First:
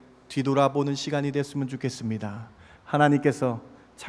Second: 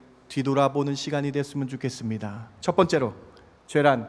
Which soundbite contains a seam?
second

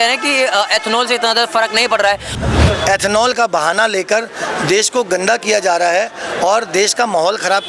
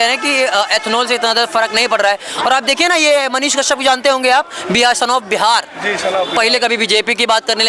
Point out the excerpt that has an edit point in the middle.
first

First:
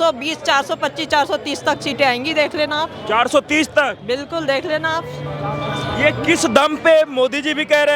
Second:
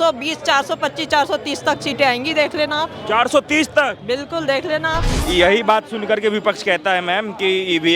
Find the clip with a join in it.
second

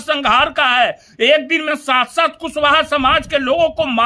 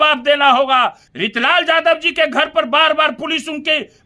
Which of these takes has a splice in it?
second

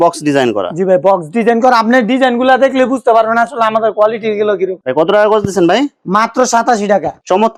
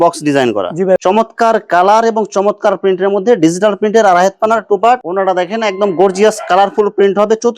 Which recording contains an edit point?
second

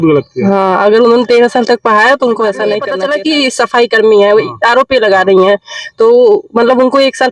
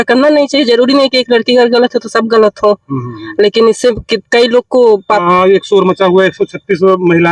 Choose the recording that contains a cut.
first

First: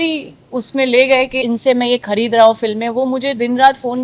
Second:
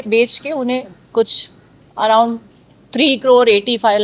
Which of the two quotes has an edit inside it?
first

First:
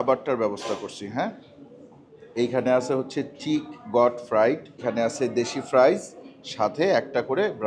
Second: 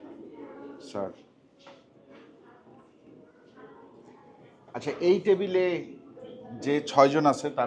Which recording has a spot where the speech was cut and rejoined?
first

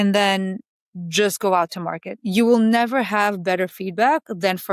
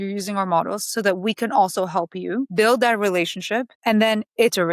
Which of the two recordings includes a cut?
second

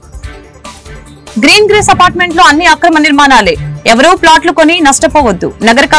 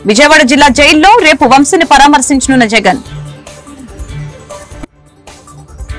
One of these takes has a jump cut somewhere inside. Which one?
first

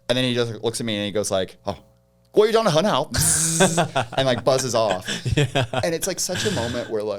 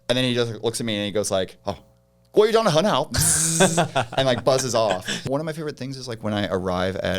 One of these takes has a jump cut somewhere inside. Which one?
second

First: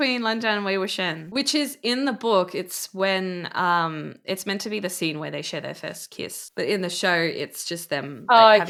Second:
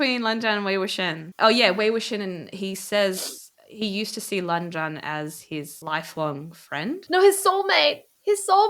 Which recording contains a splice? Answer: second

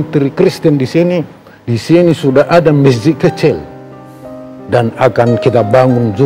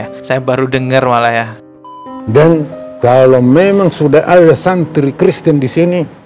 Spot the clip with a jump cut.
second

